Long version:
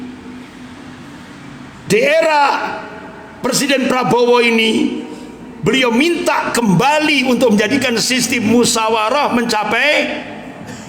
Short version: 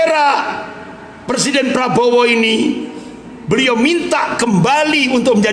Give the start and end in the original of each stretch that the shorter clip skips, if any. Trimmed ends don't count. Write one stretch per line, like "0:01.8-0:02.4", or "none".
none

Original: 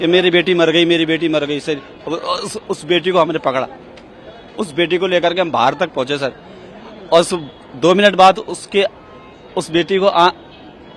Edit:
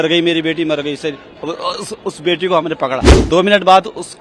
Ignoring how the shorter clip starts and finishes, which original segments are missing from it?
0:03.8-0:07.7

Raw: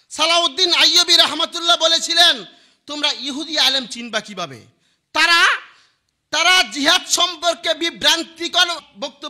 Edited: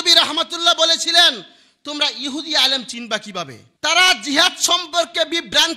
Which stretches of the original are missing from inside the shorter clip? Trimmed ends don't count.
0:04.6-0:06.1

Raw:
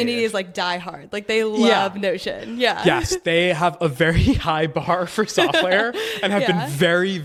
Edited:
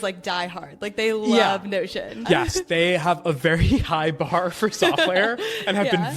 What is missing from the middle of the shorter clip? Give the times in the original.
0:02.5-0:02.8

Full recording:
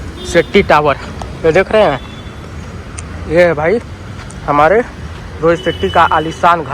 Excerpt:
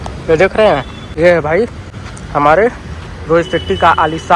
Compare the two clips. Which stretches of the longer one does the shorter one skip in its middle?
0:02.1-0:03.1

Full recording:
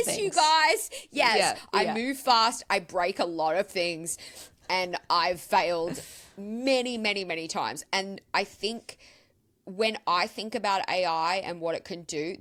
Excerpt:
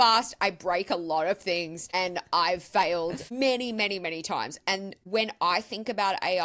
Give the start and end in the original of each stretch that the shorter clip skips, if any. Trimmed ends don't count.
0:04.1-0:04.5
0:06.0-0:06.5
0:08.2-0:09.6

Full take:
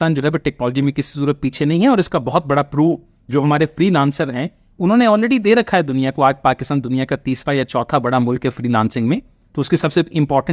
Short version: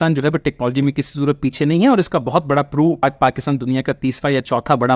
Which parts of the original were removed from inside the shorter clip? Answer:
0:03.0-0:06.3

